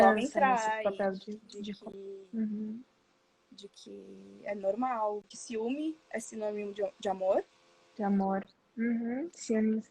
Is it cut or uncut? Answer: cut